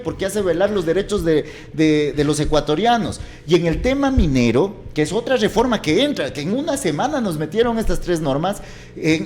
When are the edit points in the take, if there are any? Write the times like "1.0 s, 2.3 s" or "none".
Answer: none

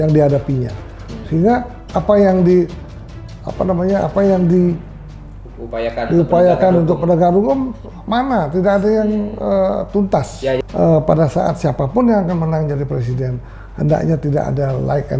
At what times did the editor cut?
10.6 s

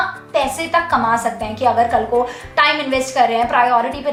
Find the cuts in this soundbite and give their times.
none

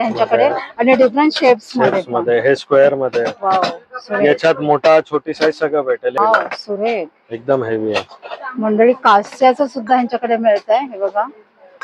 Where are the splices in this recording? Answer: 6.1 s

